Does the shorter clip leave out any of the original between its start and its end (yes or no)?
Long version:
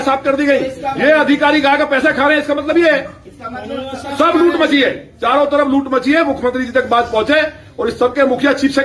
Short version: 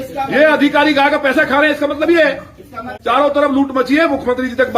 yes